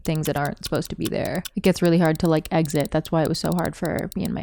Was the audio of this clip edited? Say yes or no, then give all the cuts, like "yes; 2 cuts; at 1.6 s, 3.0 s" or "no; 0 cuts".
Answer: yes; 1 cut; at 1.4 s